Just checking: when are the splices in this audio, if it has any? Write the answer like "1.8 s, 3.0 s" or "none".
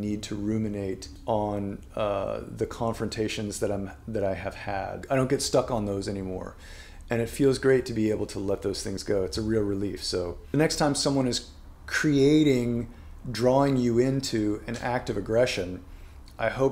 1.1 s, 5.0 s, 10.4 s